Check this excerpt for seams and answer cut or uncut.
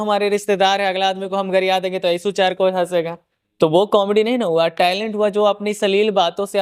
uncut